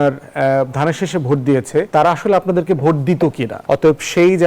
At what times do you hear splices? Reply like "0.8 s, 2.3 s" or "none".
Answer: 1.9 s, 3.5 s